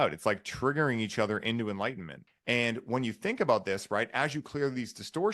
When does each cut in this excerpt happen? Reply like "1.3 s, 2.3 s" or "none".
2.1 s

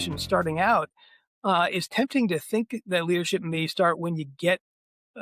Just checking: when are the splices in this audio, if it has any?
none

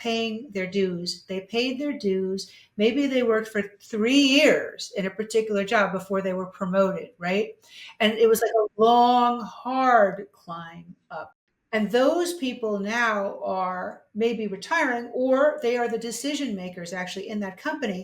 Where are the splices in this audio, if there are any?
11.5 s

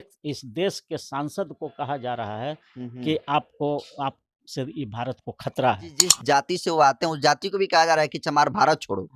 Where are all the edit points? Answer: 6.2 s

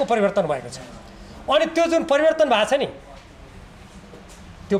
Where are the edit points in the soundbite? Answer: none

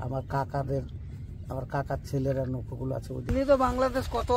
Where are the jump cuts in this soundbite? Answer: 3.3 s

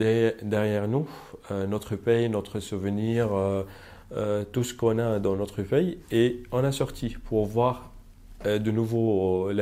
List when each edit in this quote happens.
none

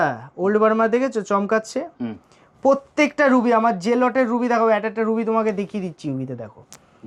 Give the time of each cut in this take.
none

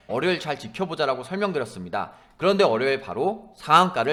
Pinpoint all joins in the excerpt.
none

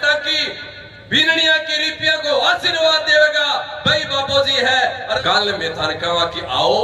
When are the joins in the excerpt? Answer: 5.2 s

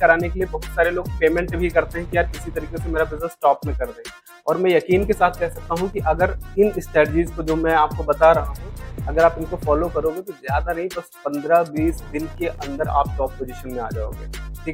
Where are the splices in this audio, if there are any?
none

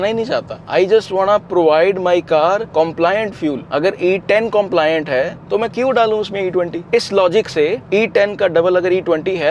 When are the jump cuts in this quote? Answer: none

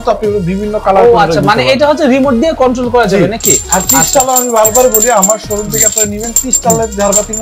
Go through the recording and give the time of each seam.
none

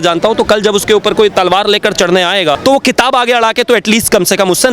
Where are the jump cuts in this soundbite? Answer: 2.6 s

